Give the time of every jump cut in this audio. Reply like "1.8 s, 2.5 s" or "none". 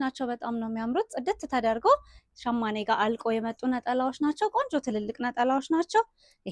none